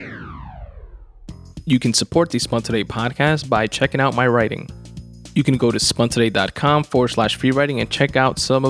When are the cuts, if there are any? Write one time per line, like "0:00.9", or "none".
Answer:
0:01.6